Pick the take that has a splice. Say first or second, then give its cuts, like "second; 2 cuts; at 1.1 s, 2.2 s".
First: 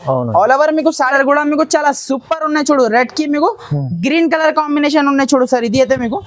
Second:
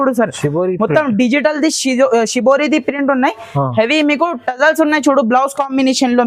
first; 1 cut; at 1.1 s